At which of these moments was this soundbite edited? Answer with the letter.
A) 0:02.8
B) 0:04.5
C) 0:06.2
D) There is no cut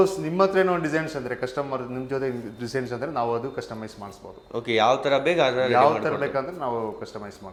D